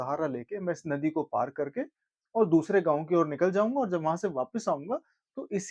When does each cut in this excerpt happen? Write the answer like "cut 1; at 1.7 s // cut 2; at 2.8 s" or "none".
none